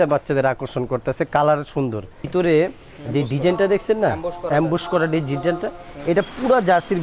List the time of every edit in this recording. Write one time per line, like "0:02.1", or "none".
0:02.2